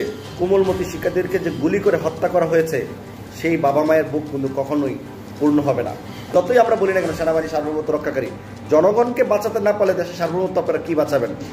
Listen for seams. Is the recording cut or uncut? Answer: cut